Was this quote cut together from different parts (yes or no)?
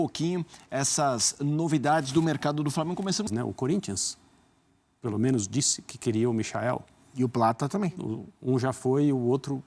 yes